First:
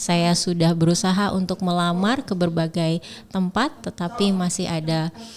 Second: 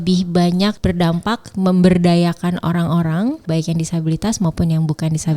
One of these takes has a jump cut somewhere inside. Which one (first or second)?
second